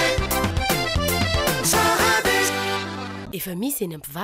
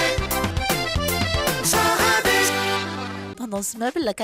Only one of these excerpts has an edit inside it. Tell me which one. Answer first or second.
second